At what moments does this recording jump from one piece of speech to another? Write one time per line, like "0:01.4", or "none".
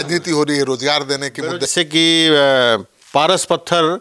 0:01.7